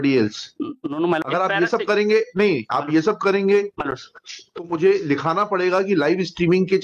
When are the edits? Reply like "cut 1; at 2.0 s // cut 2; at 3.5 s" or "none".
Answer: cut 1; at 1.2 s